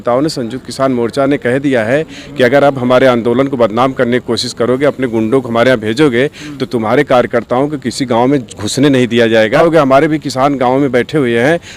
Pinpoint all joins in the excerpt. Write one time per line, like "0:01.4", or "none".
0:09.6